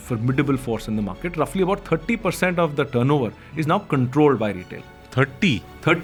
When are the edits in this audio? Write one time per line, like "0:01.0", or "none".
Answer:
none